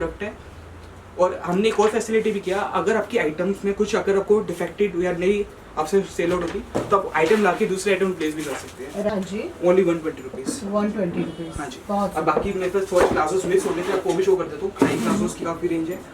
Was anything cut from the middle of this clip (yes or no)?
yes